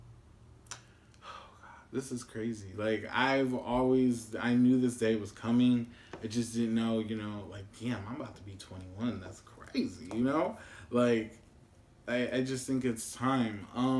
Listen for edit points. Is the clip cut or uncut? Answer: uncut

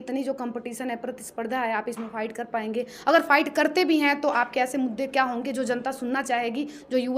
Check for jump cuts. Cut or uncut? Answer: uncut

